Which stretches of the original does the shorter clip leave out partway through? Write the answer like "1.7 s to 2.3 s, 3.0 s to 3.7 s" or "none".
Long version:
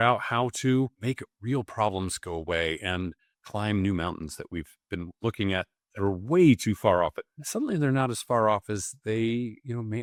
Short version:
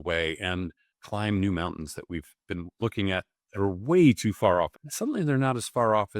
7.3 s to 7.4 s